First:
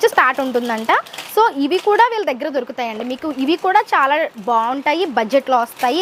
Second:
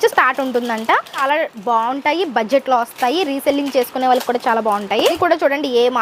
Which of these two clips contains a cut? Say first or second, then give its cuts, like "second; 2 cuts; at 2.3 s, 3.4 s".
second; 2 cuts; at 1.2 s, 5.2 s